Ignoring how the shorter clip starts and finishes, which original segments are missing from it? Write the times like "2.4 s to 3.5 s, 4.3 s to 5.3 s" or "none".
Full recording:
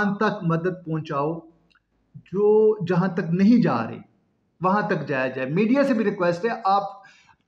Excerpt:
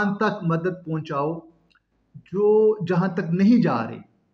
none